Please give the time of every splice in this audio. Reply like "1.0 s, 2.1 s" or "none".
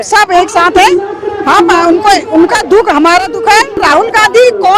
3.7 s